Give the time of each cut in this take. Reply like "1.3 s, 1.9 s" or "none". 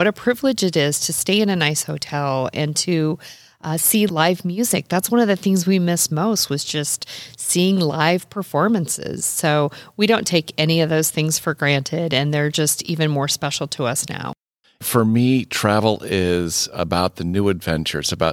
14.3 s